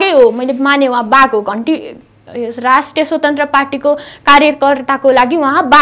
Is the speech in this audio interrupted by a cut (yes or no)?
no